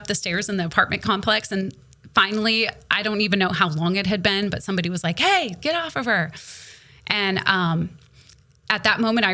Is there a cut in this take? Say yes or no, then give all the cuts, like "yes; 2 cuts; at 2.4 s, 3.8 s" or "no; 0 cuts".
no; 0 cuts